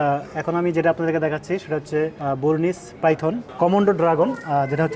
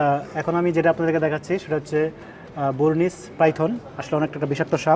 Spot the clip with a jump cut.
first; 2 cuts; at 2.2 s, 3.5 s

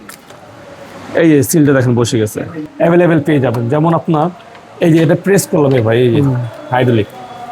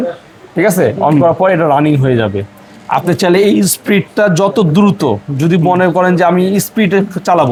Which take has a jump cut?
first; 1 cut; at 2.6 s

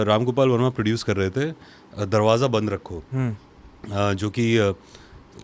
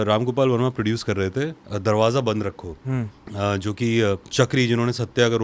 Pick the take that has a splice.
second; 3 cuts; at 1.6 s, 3.2 s, 4.2 s

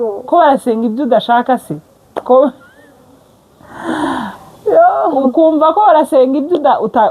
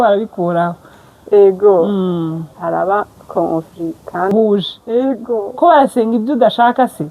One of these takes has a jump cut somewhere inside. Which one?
second; 1 cut; at 4.3 s

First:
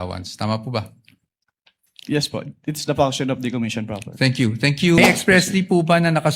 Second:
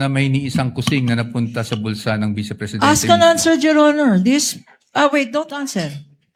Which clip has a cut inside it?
first; 1 cut; at 5.0 s

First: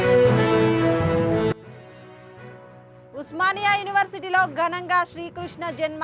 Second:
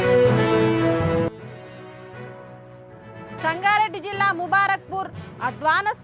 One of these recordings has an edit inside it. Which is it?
first; 1 cut; at 1.3 s

